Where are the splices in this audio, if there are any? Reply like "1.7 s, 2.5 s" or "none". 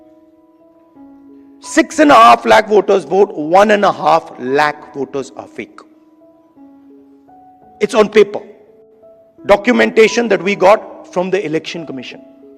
1.7 s, 5.7 s, 7.8 s